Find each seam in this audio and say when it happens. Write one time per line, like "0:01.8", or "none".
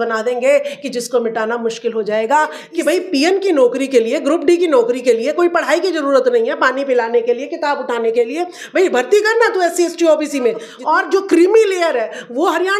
0:02.6
0:10.7